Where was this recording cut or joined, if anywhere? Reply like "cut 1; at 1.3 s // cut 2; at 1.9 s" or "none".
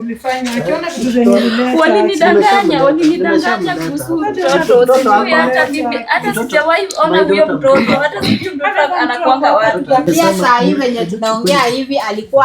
cut 1; at 10.1 s